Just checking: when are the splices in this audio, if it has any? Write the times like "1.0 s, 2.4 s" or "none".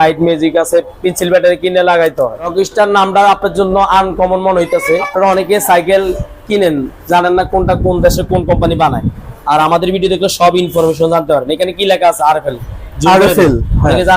2.5 s, 5.1 s